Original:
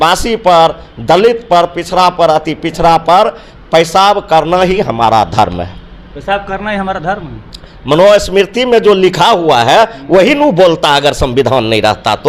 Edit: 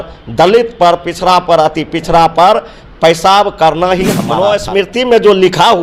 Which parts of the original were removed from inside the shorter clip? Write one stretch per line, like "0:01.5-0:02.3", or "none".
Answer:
0:04.9-0:07.8

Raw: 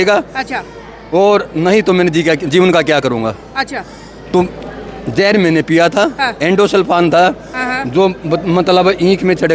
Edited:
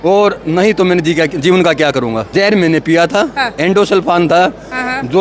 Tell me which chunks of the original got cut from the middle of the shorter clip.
0:03.3-0:05.1

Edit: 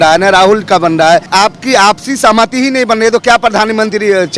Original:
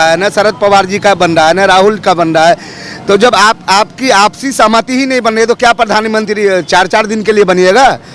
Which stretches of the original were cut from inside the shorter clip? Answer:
0:02.6-0:03.6

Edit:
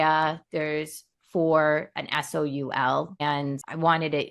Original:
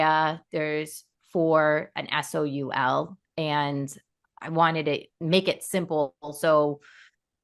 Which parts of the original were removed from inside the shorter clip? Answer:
0:03.2-0:04.0

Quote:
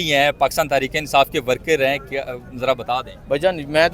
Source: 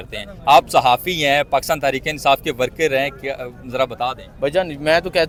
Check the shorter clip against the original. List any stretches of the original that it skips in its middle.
none

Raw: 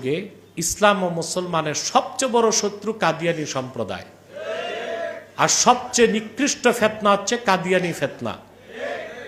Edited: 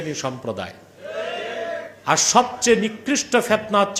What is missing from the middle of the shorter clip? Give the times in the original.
none

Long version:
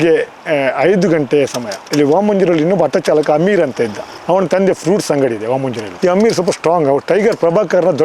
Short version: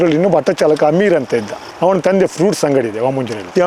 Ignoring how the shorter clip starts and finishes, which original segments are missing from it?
none

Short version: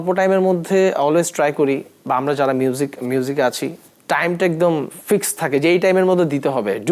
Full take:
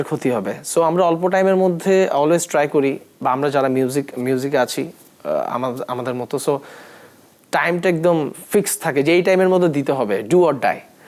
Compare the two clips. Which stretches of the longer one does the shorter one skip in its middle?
0:05.0-0:07.3

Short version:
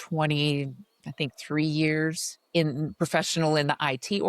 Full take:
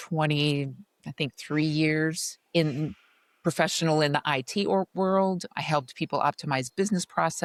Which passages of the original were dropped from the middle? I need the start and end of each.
0:02.9-0:03.4

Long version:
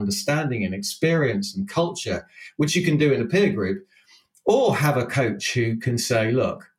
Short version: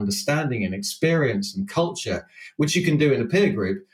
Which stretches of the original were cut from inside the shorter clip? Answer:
none

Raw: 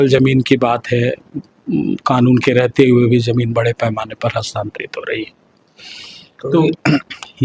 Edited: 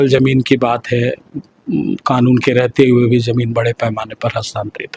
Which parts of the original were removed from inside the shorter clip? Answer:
none

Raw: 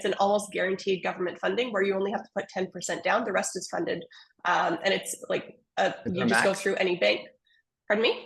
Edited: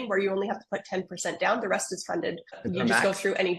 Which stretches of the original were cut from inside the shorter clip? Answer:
0:04.2-0:06.0

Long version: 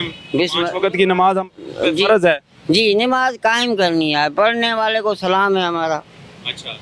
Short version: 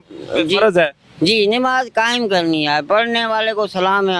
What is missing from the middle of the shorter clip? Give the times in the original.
none

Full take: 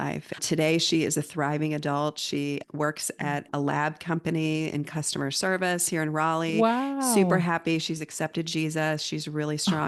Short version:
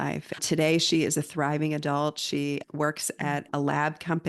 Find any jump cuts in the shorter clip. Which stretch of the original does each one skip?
none

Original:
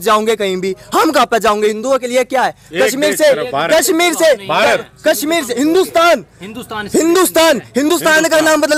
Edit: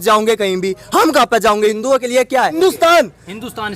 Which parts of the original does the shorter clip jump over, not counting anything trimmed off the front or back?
0:02.6-0:05.7

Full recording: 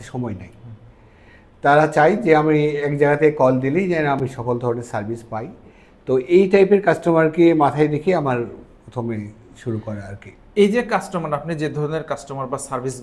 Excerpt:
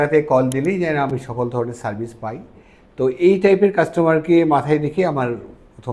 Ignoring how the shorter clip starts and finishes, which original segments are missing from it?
none

